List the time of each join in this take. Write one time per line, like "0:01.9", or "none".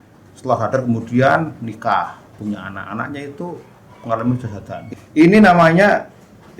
0:04.8